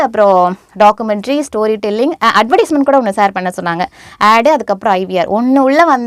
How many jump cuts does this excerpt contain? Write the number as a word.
zero